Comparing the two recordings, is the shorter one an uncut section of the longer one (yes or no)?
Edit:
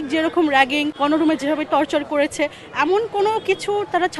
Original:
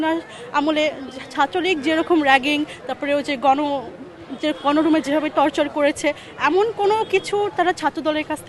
no